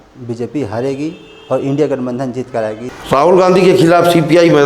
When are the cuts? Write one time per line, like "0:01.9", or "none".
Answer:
0:02.9